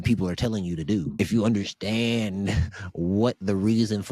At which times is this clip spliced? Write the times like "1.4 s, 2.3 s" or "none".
1.1 s